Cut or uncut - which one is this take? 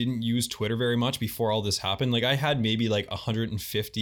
uncut